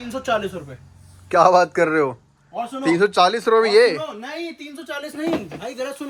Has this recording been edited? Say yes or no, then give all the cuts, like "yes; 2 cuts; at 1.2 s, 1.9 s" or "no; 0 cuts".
no; 0 cuts